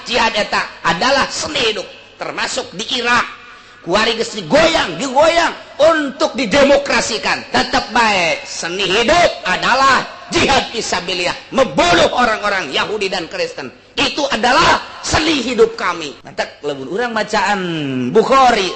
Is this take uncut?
no; 1 cut; at 16.2 s

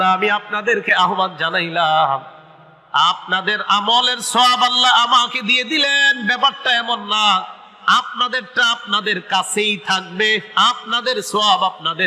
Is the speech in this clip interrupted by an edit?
no; 0 cuts

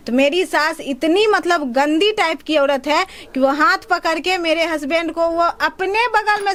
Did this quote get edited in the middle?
no; 0 cuts

